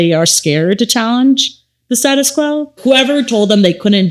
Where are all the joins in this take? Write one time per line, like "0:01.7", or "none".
0:02.8